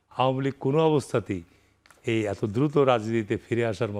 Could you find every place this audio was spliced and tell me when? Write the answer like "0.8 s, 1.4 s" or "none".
none